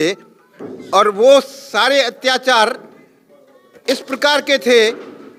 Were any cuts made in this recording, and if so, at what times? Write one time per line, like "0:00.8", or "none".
none